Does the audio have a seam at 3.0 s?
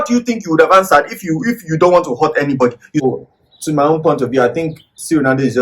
yes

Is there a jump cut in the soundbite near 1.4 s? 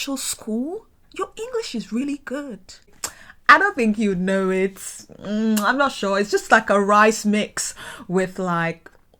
no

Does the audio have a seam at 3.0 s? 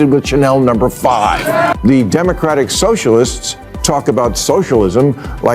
no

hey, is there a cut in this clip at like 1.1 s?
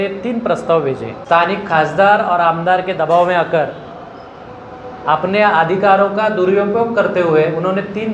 yes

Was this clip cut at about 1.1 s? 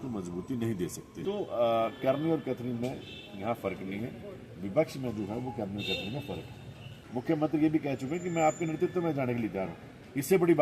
yes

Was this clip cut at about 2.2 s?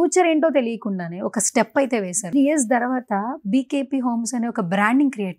yes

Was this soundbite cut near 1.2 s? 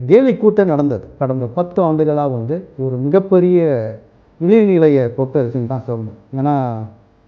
yes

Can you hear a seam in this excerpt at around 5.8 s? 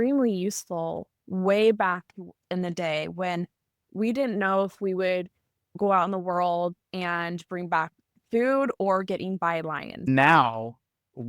yes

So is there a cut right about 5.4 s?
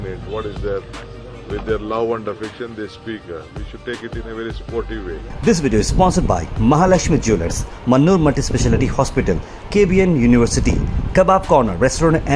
yes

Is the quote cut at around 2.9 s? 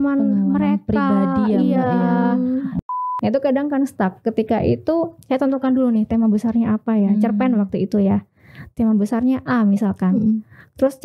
yes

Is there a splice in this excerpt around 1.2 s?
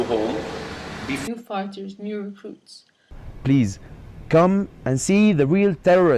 no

